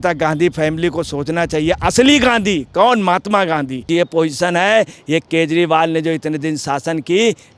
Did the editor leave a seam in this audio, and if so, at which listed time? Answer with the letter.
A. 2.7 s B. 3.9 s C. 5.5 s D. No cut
B